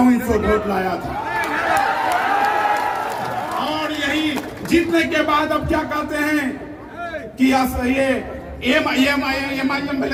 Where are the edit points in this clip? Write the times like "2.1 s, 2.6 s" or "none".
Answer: none